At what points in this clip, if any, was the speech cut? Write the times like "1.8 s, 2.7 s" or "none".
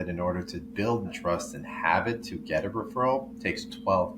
1.1 s